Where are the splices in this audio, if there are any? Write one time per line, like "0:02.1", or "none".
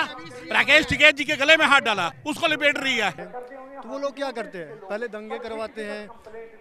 0:02.2
0:03.2